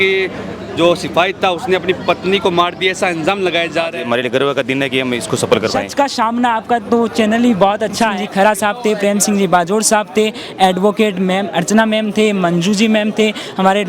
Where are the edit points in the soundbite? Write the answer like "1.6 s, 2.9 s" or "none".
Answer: 4.0 s, 5.9 s, 8.2 s